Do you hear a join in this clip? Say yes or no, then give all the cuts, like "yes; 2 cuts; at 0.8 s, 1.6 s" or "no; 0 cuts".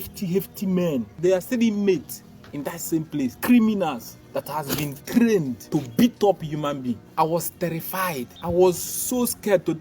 yes; 5 cuts; at 1.1 s, 3.4 s, 5.6 s, 7.1 s, 8.3 s